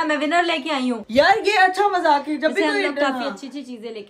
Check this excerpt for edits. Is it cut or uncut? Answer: uncut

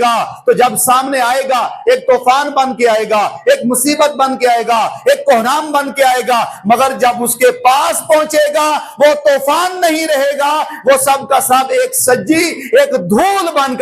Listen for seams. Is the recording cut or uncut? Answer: uncut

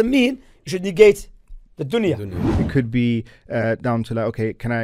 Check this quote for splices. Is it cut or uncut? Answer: cut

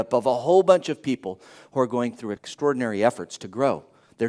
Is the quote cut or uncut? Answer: cut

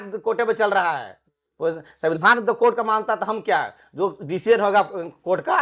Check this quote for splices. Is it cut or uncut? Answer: uncut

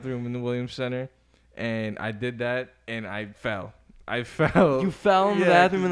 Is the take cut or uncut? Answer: uncut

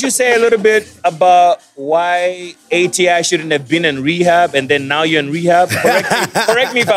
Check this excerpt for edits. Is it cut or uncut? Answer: cut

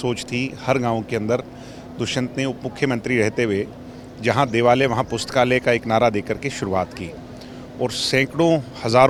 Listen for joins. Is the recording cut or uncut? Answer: uncut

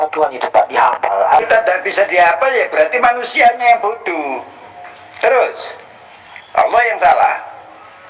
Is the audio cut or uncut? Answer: cut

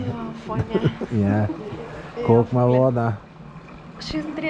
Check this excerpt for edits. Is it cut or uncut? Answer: uncut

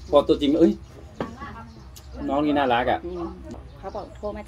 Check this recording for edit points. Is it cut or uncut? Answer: cut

